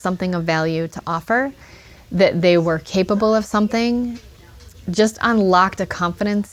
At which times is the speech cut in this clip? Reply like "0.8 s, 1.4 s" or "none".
none